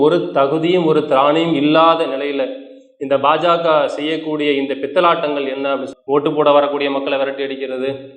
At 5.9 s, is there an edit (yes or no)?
yes